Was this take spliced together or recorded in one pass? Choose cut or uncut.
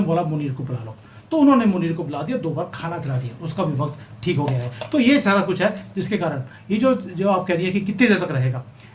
uncut